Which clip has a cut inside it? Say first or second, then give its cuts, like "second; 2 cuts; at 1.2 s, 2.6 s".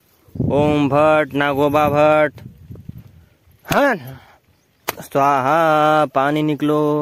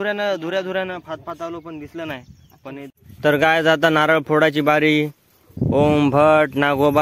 second; 1 cut; at 2.9 s